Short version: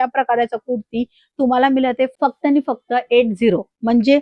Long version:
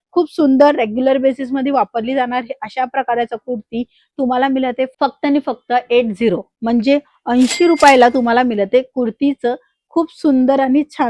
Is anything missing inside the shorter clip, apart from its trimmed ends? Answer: no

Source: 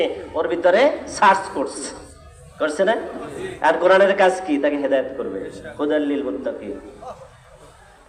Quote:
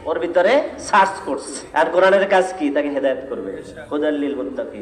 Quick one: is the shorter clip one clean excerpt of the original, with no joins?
no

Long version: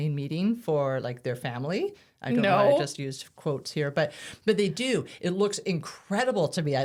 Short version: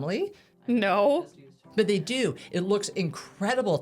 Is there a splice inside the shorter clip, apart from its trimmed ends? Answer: yes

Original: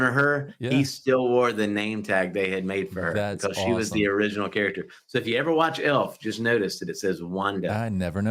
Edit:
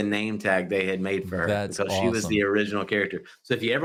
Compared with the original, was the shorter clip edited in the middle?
no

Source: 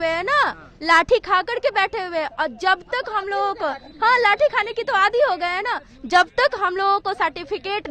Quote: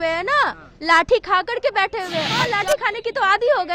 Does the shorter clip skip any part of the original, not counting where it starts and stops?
yes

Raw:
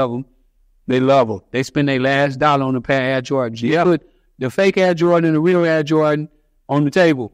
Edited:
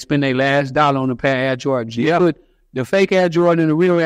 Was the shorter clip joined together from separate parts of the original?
no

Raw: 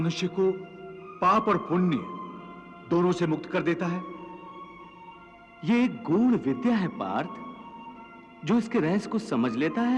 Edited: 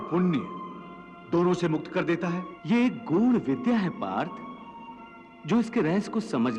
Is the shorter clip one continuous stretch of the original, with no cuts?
no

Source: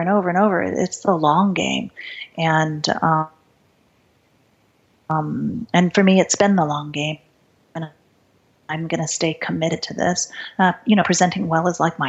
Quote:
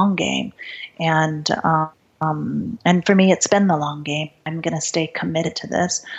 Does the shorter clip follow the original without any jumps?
no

